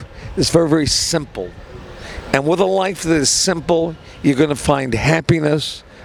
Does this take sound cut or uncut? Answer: uncut